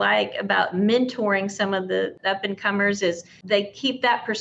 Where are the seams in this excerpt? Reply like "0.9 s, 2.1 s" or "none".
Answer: 2.2 s, 3.3 s